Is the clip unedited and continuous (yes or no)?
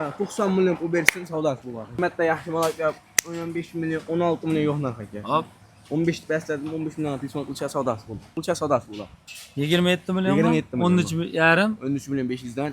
no